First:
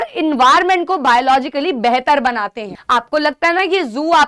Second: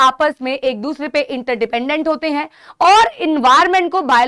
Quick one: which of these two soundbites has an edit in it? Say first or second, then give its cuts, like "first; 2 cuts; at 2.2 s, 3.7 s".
first; 1 cut; at 2.7 s